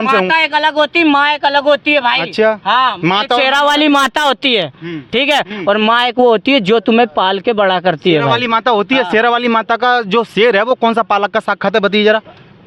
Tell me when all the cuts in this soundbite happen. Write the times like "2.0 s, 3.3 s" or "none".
none